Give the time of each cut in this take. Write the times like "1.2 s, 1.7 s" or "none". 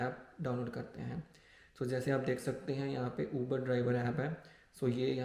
none